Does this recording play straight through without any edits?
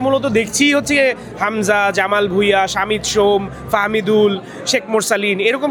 yes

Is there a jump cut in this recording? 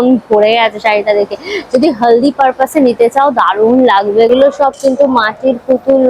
yes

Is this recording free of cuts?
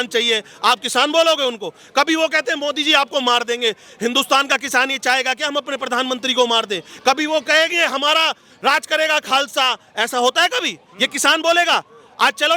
yes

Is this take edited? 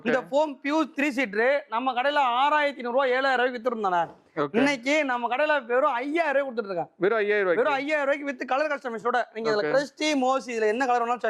no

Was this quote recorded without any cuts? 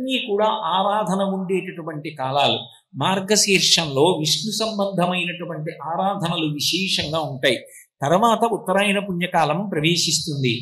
yes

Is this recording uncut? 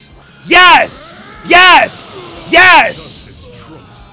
yes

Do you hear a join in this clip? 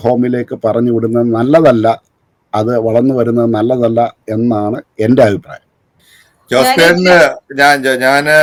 no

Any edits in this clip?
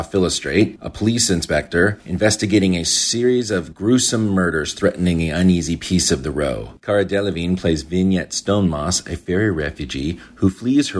yes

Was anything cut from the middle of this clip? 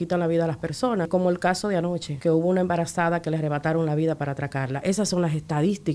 yes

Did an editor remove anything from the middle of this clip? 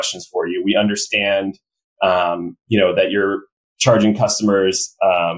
no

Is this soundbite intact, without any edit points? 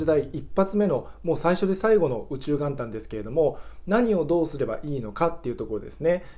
yes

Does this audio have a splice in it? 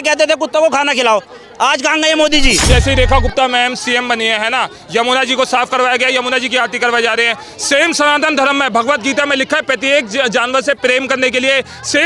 yes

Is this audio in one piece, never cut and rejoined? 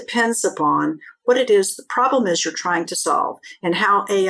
no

